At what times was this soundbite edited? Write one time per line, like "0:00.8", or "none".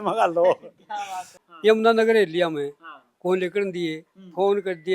0:01.4